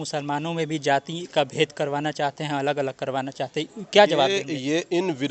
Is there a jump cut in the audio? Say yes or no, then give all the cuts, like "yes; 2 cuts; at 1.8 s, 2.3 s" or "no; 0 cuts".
no; 0 cuts